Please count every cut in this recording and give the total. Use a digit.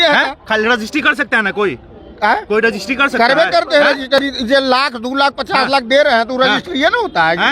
0